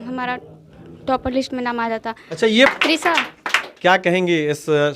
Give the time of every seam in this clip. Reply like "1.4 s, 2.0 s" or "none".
2.7 s